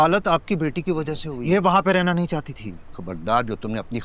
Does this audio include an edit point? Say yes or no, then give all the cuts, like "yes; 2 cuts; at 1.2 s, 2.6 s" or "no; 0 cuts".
yes; 1 cut; at 1.3 s